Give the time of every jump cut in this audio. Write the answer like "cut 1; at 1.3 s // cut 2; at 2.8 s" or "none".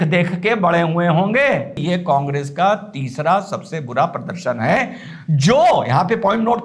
cut 1; at 1.7 s